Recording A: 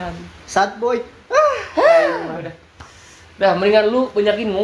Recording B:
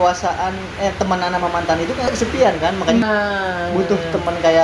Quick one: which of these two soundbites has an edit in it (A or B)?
B